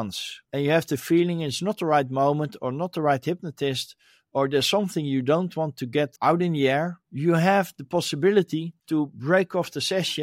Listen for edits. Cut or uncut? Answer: uncut